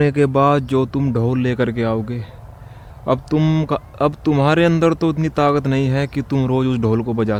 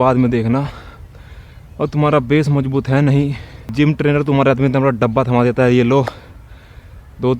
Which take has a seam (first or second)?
second